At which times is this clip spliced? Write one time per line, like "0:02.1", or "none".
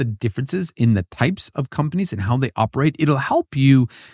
none